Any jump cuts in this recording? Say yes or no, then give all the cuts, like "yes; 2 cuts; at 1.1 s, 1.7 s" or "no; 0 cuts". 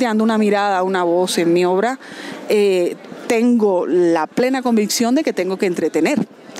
no; 0 cuts